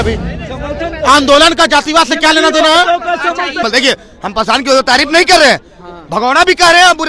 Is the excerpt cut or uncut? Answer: cut